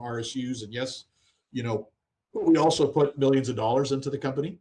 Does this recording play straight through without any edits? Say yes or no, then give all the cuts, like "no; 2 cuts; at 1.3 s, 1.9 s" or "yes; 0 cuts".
yes; 0 cuts